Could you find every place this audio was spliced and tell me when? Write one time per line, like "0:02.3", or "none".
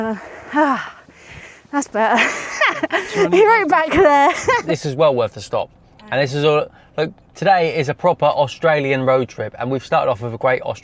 0:04.6